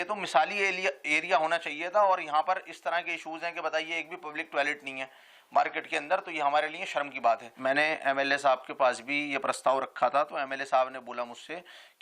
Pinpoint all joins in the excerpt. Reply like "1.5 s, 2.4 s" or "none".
7.5 s